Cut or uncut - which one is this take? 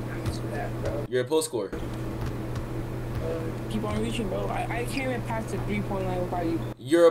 uncut